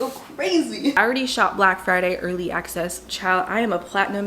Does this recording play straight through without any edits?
no; 1 cut; at 1.0 s

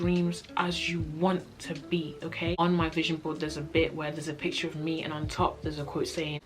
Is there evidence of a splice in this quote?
yes; 1 cut; at 2.6 s

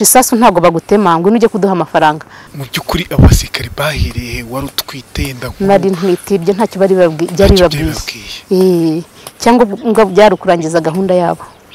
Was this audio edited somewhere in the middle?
yes; 1 cut; at 2.4 s

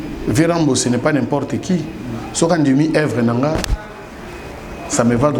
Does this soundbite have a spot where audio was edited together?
no; 0 cuts

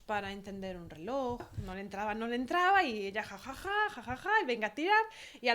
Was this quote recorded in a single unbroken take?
no; 1 cut; at 1.6 s

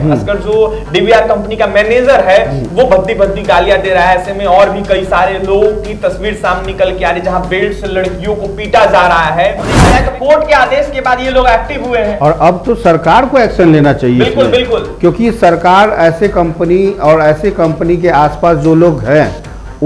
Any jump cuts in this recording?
yes; 1 cut; at 9.8 s

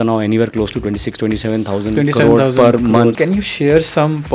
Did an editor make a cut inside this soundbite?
yes; 1 cut; at 3.2 s

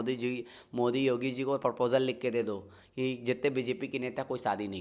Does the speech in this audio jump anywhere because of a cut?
no; 0 cuts

